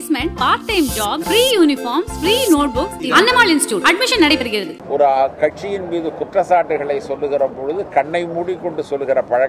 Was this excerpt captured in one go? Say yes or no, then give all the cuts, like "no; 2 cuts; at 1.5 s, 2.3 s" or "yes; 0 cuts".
no; 1 cut; at 4.7 s